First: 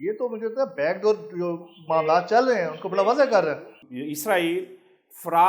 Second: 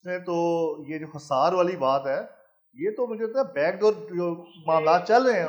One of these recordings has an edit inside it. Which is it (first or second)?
first